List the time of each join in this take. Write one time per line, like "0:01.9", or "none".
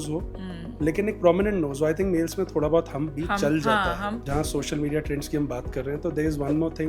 0:04.2